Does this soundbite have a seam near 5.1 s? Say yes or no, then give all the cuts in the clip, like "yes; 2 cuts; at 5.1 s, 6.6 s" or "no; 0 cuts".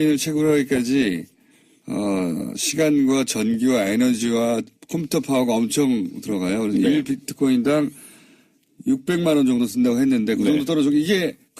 yes; 1 cut; at 5.1 s